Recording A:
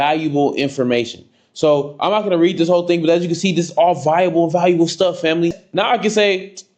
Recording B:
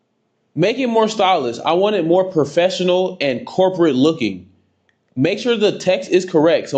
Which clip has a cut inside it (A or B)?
A